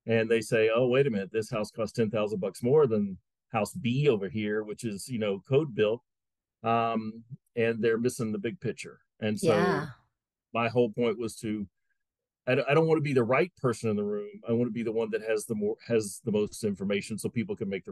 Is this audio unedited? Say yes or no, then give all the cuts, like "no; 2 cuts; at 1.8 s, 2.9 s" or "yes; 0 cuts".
yes; 0 cuts